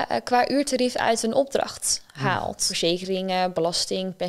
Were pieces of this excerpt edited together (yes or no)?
yes